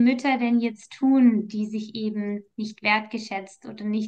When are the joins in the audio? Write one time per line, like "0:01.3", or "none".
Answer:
none

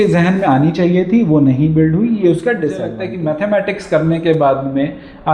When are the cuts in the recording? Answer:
0:03.1

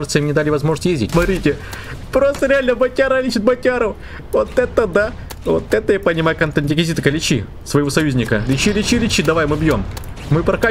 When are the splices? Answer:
0:01.1

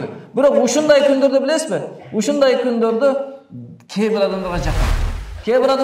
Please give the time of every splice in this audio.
0:04.8

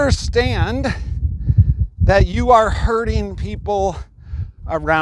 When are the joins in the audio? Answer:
none

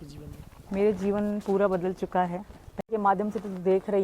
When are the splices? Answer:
0:02.9

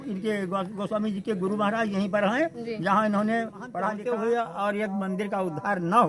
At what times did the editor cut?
0:03.9

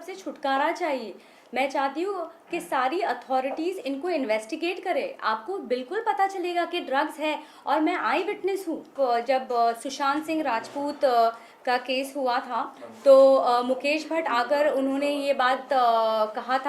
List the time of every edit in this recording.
0:08.9

